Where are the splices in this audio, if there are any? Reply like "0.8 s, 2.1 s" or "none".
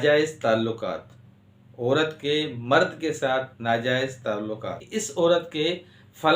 4.8 s